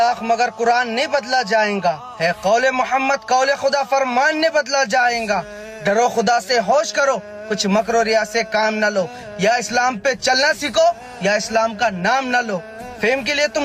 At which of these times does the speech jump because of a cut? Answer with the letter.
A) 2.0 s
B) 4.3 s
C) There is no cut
C